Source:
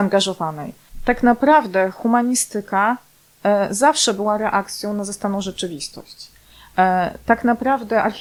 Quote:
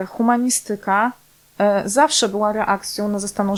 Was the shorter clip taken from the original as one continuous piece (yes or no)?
yes